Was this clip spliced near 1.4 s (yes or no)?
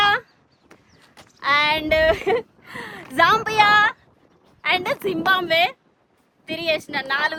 no